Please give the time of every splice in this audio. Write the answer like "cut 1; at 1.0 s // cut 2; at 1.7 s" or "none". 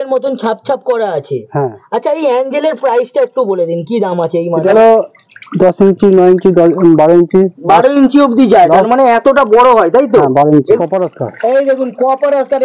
cut 1; at 4.7 s // cut 2; at 10.8 s